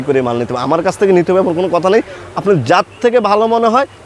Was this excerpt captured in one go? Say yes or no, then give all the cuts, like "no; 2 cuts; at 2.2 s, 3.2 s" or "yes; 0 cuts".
yes; 0 cuts